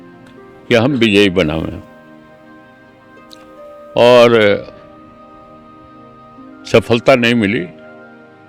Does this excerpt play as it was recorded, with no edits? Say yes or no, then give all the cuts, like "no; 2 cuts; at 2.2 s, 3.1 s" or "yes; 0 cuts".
no; 2 cuts; at 1.8 s, 3.9 s